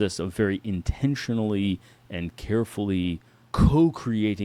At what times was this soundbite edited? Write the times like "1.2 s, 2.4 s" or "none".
none

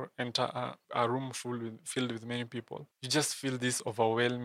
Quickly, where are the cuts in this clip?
none

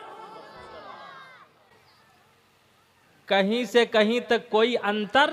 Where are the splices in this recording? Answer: none

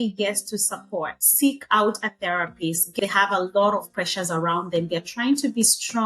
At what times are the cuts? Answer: 2.9 s

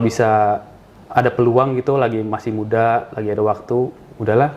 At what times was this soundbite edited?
none

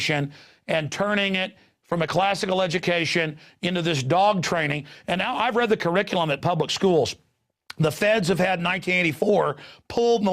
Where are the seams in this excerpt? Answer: 1.3 s

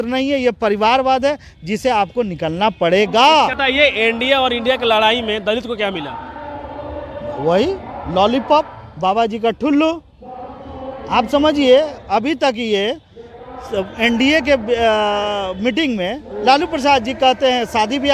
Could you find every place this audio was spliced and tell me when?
3.6 s

